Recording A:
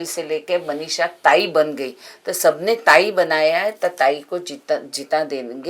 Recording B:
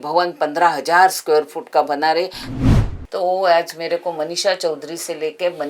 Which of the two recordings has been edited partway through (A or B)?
B